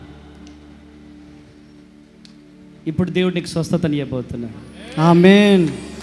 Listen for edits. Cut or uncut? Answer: uncut